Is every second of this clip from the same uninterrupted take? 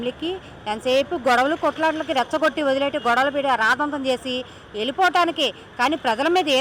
yes; 0 cuts

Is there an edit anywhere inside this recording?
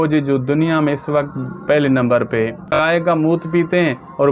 yes; 1 cut; at 2.8 s

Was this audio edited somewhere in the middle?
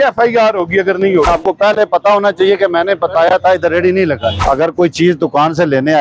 yes; 2 cuts; at 1.3 s, 4.4 s

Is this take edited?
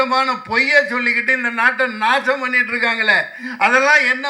no; 0 cuts

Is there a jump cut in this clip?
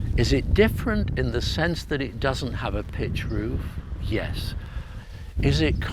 yes; 1 cut; at 5.0 s

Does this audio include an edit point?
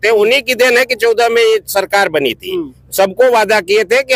no; 0 cuts

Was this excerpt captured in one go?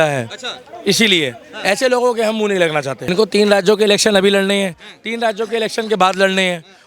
no; 1 cut; at 3.1 s

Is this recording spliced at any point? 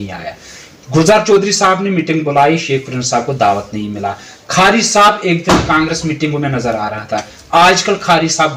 no; 0 cuts

